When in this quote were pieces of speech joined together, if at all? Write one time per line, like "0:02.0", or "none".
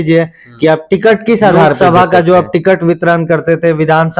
0:01.8